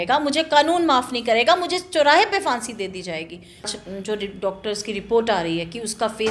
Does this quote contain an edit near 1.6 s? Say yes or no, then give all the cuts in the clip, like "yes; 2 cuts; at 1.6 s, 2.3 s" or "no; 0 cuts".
no; 1 cut; at 3.7 s